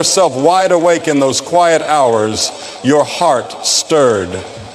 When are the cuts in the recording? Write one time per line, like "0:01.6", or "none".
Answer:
0:01.0